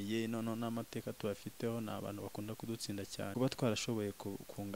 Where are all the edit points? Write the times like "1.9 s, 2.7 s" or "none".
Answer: 3.3 s